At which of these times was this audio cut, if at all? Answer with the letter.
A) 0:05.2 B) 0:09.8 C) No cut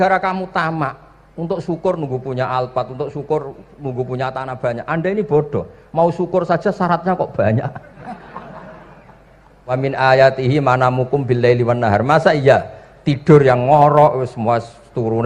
B